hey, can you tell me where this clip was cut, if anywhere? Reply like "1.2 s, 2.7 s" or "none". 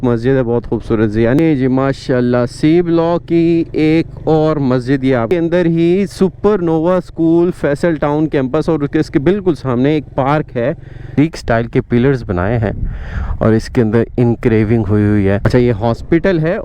1.4 s, 5.3 s, 11.2 s, 15.4 s